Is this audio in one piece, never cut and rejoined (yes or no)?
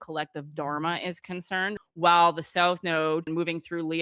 no